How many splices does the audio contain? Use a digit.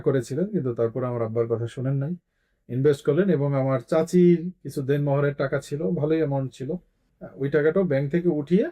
0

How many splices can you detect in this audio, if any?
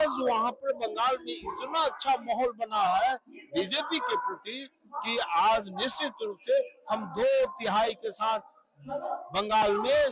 0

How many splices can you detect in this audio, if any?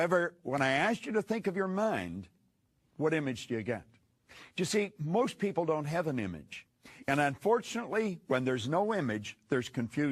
0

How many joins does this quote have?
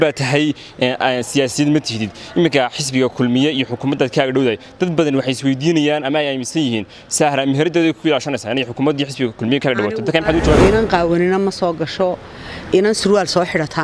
1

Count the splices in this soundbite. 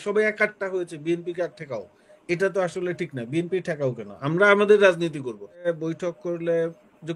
1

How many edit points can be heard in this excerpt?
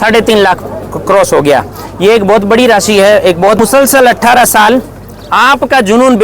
1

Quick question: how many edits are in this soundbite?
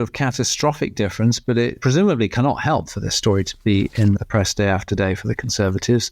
2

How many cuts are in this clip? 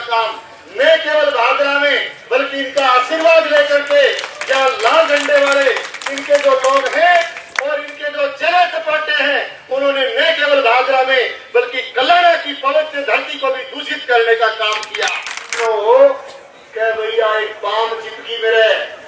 1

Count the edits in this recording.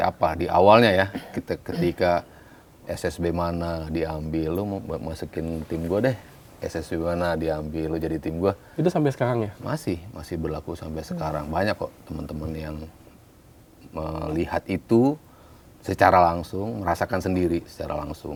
0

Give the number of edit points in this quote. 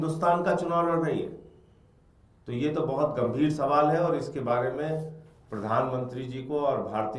0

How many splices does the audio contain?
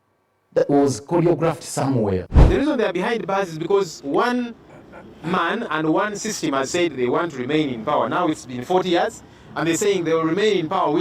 1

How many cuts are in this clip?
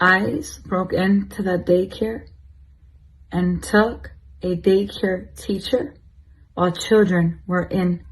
1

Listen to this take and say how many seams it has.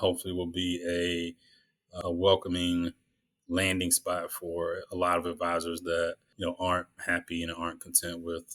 1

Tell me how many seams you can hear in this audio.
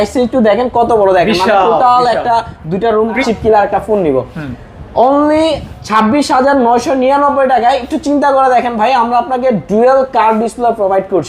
1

